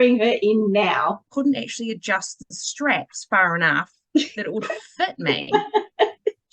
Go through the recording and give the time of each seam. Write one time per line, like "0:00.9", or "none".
0:01.2